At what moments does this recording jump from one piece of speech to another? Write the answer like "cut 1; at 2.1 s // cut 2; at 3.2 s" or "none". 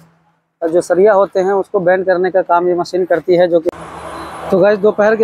cut 1; at 3.7 s